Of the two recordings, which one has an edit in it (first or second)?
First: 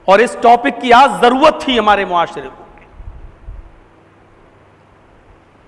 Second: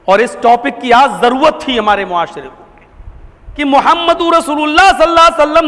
second